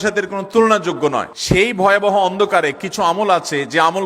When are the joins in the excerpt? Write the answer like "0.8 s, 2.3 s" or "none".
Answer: 1.3 s